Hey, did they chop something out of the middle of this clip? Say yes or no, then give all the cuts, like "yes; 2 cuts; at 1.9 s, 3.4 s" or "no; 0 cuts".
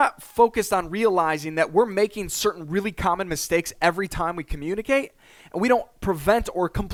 no; 0 cuts